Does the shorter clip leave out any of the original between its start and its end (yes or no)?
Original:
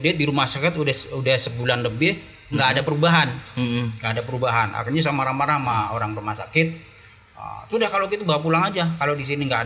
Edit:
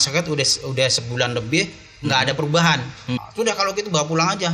yes